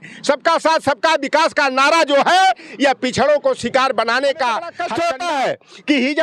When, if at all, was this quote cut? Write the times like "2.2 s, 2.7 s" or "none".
4.8 s

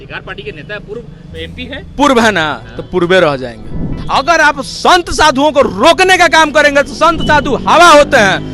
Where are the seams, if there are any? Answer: 3.9 s

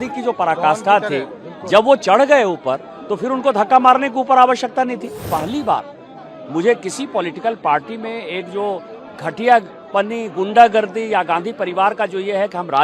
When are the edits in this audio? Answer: 5.2 s

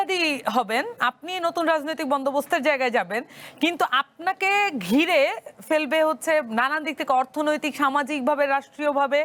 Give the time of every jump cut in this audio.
none

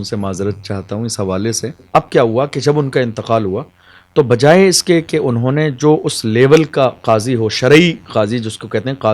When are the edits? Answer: 1.8 s

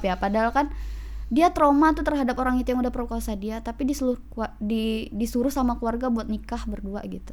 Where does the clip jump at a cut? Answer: none

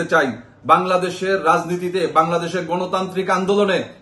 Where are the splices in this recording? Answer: none

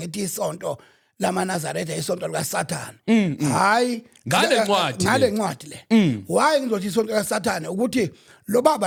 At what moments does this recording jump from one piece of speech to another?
none

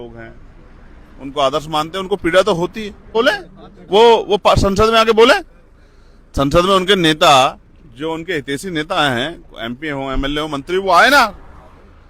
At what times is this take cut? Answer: 3.1 s

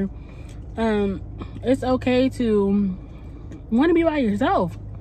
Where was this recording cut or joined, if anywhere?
none

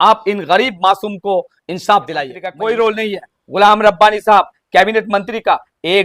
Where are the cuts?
2.4 s

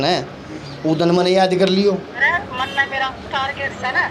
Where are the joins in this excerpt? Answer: 2.2 s

